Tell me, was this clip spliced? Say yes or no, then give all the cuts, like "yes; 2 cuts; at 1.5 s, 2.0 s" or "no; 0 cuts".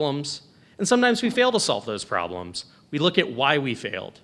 no; 0 cuts